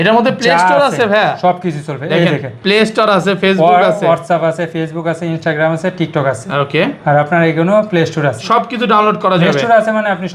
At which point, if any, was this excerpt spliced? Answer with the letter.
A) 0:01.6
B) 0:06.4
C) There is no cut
C